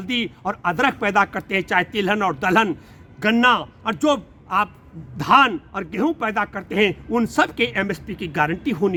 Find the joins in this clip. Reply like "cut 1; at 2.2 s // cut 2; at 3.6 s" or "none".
none